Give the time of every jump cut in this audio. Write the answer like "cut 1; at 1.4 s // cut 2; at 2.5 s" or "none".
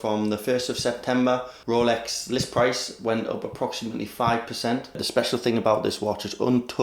cut 1; at 1.5 s // cut 2; at 5.0 s